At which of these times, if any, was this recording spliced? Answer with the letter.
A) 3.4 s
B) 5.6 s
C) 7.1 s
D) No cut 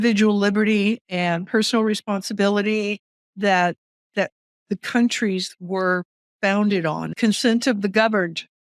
C